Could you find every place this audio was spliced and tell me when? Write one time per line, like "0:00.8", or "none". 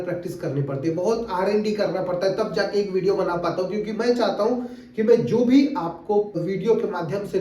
0:06.4